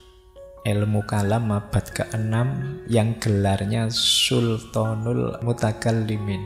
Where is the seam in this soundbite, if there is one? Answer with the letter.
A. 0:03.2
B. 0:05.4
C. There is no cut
B